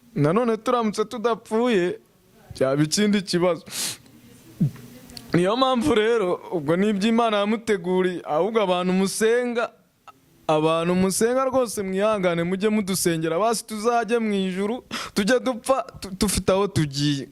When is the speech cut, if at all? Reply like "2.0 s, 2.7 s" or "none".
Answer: none